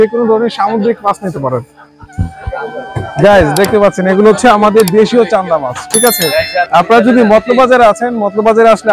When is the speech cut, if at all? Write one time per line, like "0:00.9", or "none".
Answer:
0:02.5